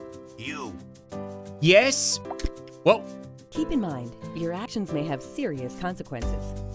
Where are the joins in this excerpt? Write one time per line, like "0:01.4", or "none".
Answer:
0:01.6